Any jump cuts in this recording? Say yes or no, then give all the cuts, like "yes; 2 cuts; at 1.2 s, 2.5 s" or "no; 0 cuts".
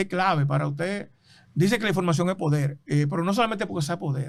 no; 0 cuts